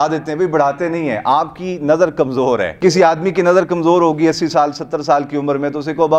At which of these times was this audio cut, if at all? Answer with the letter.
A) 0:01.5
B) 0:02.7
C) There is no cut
B